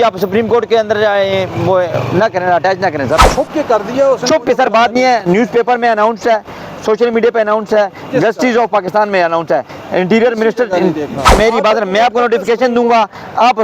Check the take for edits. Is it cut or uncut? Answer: cut